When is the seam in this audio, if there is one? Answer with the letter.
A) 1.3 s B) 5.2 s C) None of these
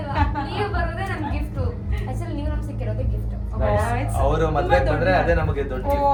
C